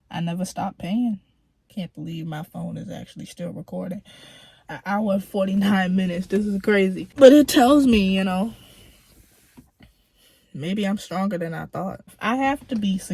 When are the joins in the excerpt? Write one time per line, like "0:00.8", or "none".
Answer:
0:01.7
0:12.2